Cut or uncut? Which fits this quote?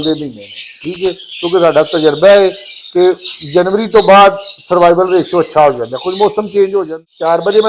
cut